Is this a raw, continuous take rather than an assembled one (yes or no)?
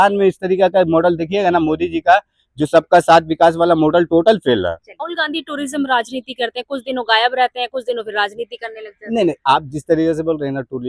no